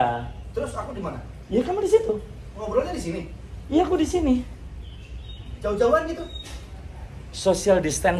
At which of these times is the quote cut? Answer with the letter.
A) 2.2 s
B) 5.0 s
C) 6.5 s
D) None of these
D